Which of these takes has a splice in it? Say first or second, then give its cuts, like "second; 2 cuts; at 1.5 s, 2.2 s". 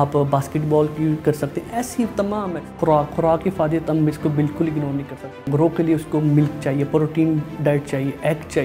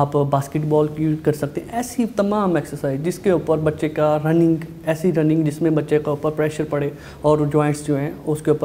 first; 2 cuts; at 2.7 s, 5.4 s